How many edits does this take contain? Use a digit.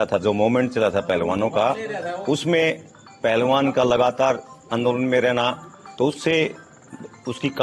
0